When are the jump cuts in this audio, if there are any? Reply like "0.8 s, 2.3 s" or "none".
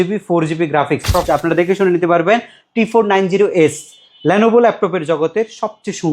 1.2 s